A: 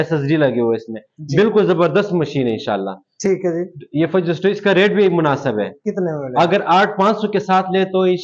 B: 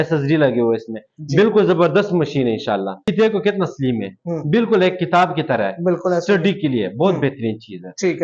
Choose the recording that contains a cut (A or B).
B